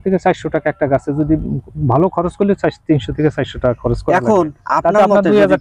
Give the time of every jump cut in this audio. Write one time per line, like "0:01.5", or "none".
none